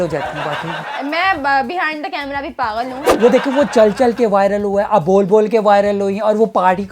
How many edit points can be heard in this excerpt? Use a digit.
1